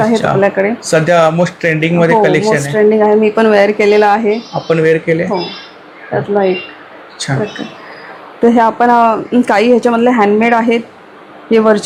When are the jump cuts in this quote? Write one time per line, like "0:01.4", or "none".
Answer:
none